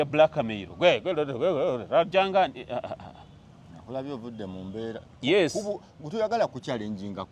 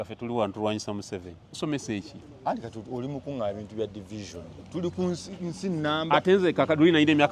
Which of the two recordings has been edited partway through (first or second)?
second